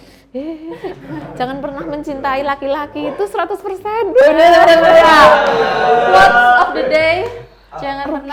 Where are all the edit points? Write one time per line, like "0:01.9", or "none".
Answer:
none